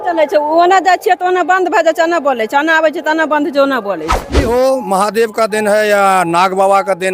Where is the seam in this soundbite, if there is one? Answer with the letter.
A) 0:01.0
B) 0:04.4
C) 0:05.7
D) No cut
B